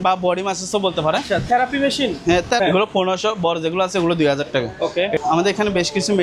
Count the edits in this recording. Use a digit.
2